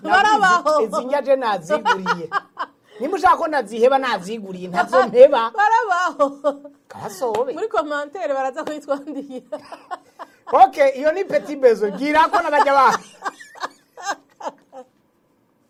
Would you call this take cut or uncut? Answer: uncut